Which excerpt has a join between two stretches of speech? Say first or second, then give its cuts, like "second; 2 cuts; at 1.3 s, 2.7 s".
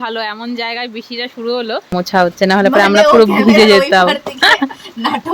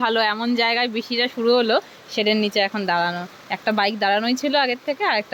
first; 1 cut; at 2.2 s